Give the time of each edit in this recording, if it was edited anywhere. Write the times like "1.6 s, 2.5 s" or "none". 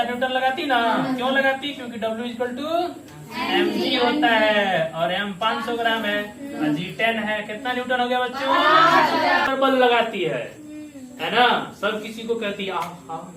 9.5 s